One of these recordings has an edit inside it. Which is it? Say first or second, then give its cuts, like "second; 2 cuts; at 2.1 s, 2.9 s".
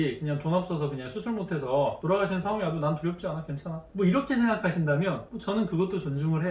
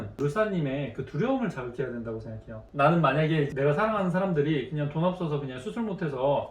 second; 2 cuts; at 2.5 s, 3.5 s